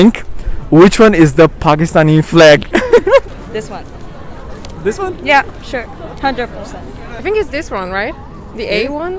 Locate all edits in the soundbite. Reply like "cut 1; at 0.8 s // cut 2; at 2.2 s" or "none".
cut 1; at 3.3 s // cut 2; at 7.1 s